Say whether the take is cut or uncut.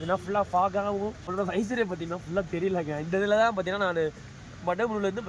cut